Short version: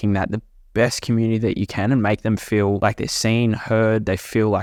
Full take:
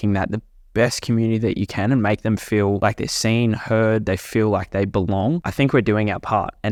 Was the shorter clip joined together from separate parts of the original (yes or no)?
no